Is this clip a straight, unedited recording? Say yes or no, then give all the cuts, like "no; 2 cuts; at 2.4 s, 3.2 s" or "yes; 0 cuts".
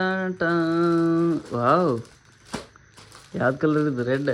yes; 0 cuts